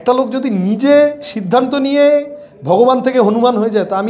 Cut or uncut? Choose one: uncut